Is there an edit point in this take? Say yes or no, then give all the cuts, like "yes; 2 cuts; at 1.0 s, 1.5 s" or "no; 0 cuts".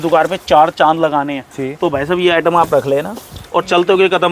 no; 0 cuts